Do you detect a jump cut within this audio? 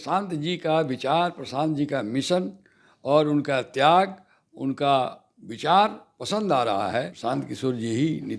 yes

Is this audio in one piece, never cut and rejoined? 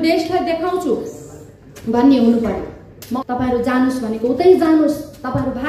no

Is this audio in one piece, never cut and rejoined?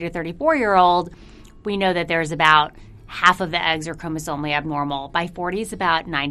yes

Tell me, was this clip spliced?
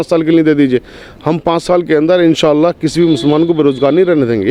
no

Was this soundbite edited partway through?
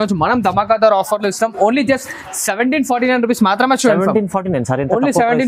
no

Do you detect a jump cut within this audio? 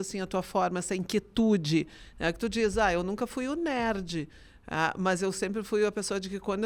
no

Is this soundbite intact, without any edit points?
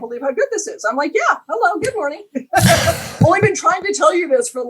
yes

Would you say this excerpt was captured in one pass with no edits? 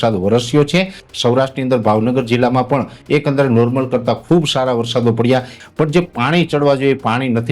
no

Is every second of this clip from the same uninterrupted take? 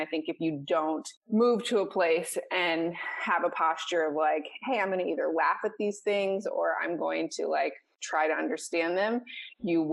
yes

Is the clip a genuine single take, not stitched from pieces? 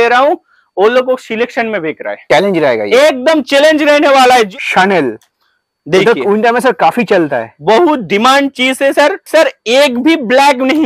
no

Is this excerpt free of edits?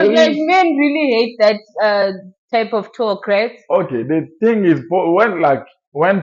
yes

